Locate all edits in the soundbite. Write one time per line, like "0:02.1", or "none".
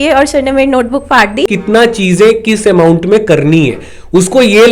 0:01.5